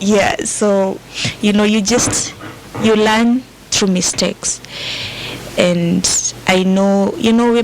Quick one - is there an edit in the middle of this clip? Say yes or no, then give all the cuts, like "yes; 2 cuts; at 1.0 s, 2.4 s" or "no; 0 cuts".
no; 0 cuts